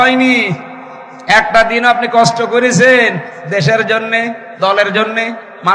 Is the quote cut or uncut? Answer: uncut